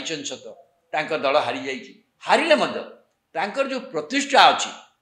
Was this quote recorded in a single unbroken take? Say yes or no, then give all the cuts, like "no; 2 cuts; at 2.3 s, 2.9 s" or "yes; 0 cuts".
yes; 0 cuts